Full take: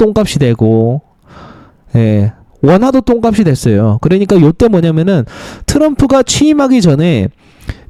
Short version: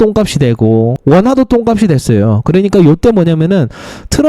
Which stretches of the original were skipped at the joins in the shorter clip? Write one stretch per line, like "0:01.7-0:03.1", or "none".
0:01.0-0:02.5